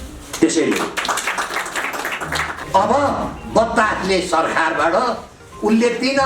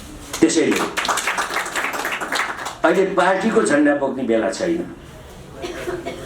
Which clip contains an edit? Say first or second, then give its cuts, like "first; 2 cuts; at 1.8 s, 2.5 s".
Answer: first; 1 cut; at 2.6 s